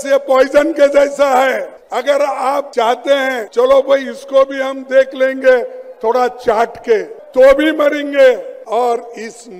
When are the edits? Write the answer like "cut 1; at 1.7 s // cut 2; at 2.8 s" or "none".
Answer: cut 1; at 1.8 s // cut 2; at 2.7 s // cut 3; at 3.4 s // cut 4; at 7.2 s // cut 5; at 8.5 s

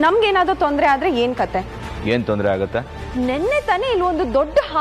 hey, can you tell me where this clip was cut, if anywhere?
cut 1; at 3.0 s

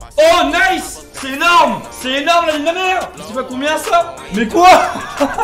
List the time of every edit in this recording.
cut 1; at 3.2 s // cut 2; at 4.2 s

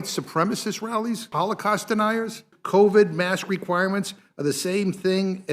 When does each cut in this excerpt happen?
cut 1; at 1.3 s // cut 2; at 2.5 s

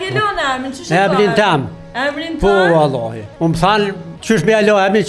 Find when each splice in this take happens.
cut 1; at 3.2 s // cut 2; at 4.1 s

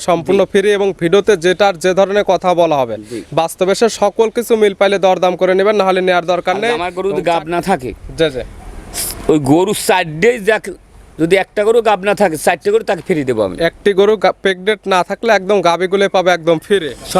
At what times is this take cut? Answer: cut 1; at 6.9 s

